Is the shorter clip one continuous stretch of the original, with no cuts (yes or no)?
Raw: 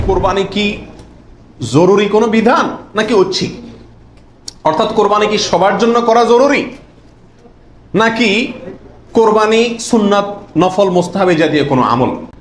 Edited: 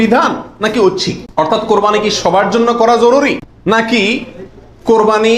no